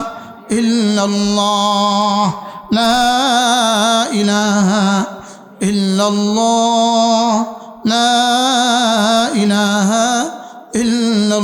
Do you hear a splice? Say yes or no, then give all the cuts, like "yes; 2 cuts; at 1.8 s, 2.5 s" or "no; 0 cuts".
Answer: no; 0 cuts